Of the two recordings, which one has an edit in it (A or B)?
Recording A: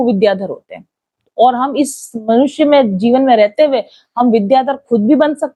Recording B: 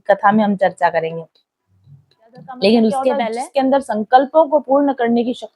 B